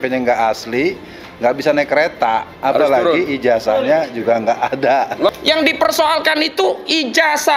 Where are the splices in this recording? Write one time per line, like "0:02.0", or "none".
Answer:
0:05.3